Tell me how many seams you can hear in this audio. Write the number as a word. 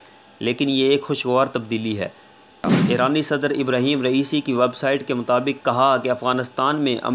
one